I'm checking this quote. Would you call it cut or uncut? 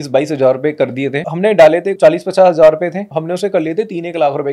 cut